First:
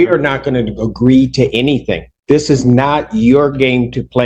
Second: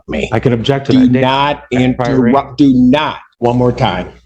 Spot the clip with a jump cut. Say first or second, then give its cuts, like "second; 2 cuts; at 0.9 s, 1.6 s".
second; 1 cut; at 3.2 s